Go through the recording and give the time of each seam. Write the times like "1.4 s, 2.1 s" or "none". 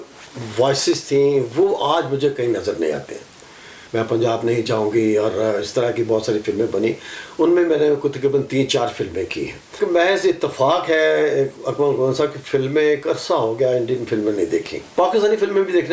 3.8 s, 9.7 s, 14.8 s